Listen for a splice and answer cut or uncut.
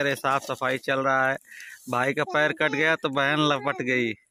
uncut